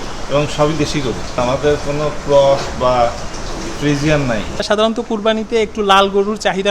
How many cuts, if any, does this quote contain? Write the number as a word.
two